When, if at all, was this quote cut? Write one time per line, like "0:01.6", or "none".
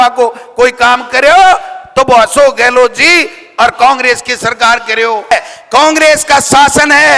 0:05.3